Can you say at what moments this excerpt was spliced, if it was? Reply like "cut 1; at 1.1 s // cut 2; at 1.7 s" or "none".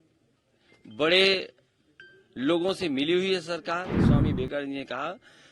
cut 1; at 4.0 s